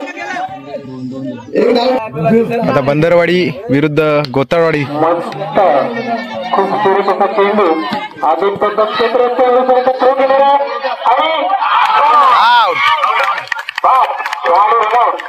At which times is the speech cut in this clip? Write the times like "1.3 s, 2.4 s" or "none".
2.0 s